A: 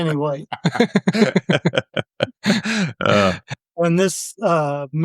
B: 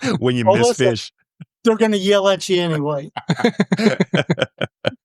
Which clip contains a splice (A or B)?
A